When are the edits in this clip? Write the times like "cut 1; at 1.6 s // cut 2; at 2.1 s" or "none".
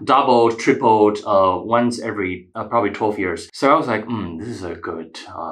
cut 1; at 2.5 s // cut 2; at 3.5 s

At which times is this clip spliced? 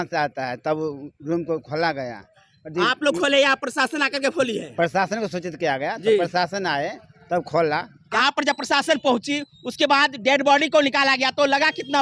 none

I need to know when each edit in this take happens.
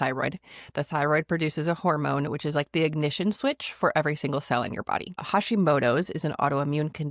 cut 1; at 5.2 s

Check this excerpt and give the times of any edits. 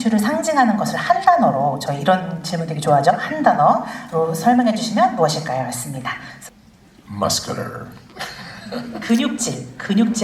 cut 1; at 6.3 s

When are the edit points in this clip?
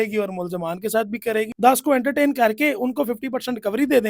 cut 1; at 1.5 s

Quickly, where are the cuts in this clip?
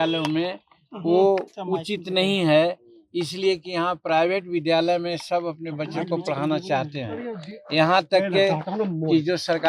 none

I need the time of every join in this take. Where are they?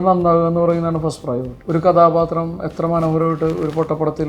cut 1; at 1.5 s

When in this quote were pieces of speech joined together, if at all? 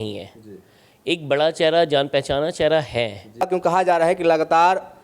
cut 1; at 3.5 s

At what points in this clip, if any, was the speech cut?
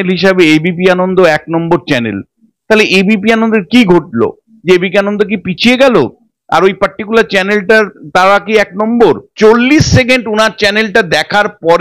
cut 1; at 9.3 s

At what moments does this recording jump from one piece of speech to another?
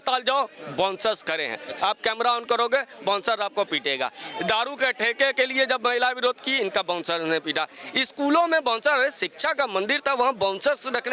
none

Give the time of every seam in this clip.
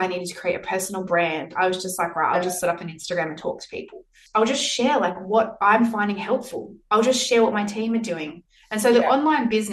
cut 1; at 4.1 s

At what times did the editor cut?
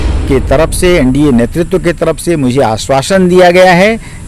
none

